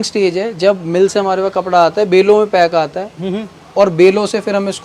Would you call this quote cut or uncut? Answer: uncut